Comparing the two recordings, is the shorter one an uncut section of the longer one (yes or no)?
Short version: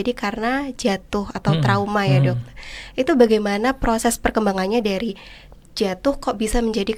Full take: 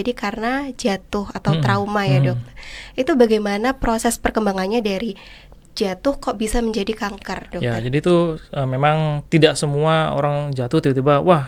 yes